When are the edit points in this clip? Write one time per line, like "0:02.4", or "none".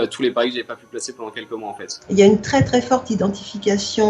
0:02.0

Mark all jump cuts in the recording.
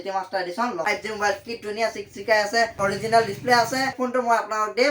0:00.8
0:03.9

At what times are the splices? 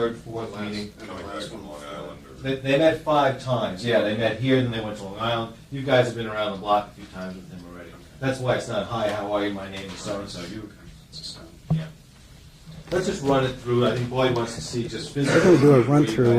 0:01.0

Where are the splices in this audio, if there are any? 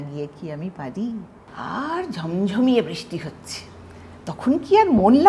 0:01.4

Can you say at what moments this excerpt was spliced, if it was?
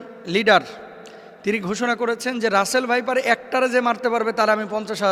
none

